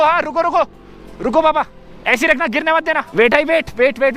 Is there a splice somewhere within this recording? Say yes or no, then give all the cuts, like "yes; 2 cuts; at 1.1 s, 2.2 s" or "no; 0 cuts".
yes; 1 cut; at 3.1 s